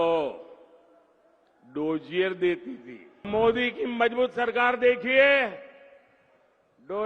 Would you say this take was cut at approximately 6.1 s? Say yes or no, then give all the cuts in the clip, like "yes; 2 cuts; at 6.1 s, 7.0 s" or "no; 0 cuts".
no; 1 cut; at 3.2 s